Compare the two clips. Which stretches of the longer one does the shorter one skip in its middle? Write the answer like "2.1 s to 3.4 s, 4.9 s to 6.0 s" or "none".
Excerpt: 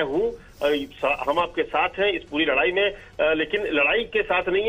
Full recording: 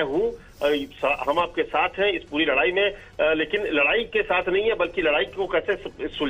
none